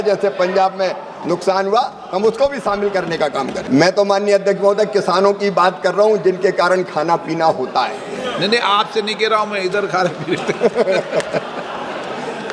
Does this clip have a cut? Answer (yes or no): yes